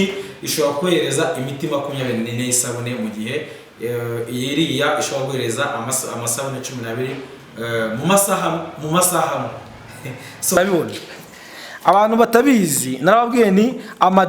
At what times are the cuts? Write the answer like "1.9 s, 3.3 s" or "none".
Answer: 10.6 s